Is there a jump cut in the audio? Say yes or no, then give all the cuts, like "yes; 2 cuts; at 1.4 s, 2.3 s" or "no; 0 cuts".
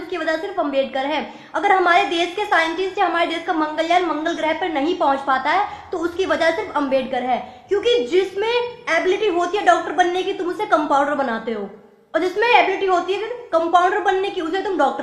no; 0 cuts